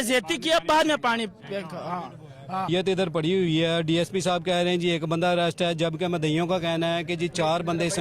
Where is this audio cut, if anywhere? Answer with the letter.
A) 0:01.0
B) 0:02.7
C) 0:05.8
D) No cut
B